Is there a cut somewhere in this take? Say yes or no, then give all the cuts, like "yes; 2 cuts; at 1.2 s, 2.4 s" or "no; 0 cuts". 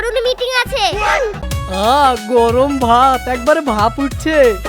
yes; 1 cut; at 1.5 s